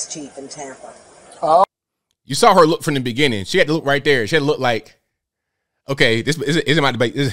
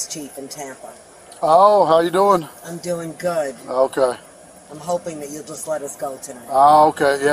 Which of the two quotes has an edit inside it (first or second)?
second